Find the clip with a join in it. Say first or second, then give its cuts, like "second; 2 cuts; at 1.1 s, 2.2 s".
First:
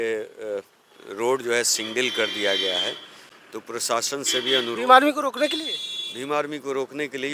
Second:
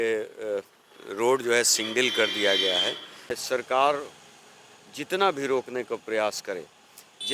second; 1 cut; at 3.4 s